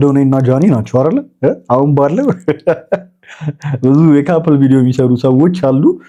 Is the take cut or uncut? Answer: uncut